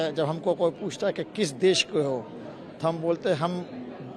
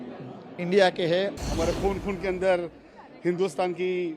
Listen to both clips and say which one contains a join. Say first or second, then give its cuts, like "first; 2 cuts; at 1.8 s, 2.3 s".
second; 1 cut; at 1.4 s